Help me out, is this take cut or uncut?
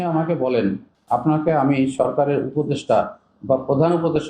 cut